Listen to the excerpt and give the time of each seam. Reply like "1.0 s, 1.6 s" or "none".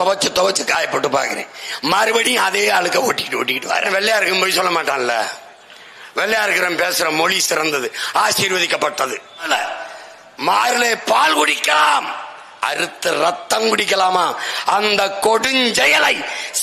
3.9 s, 9.5 s